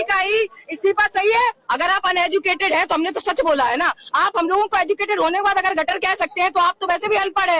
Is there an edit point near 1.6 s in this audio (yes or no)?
yes